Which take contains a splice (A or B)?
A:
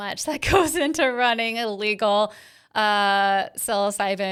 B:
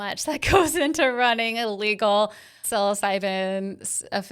B